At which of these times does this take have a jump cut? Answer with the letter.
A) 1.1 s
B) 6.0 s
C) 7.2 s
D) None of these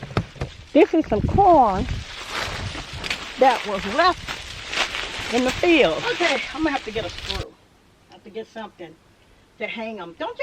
B